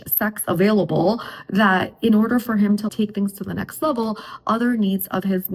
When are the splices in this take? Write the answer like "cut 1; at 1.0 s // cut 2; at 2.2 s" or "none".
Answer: none